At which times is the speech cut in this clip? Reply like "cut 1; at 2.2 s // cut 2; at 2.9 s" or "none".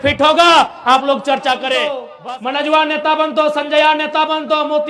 cut 1; at 2.1 s